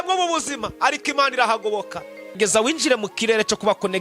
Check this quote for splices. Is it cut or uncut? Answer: cut